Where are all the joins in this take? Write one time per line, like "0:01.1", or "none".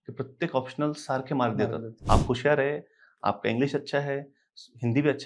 0:01.9